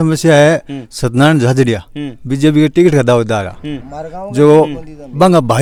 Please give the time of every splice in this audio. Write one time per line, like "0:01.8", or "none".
none